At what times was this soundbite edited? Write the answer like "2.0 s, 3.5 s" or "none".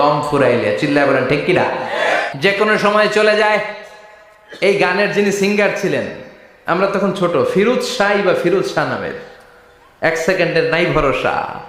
2.2 s